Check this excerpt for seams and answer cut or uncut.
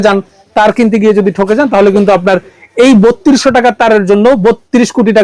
uncut